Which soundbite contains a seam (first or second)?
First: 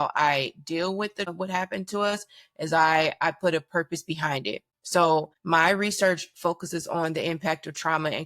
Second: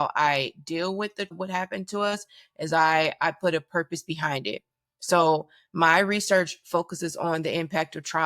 first